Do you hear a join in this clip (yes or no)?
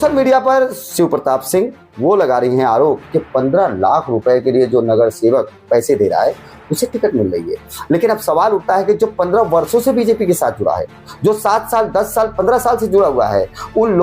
yes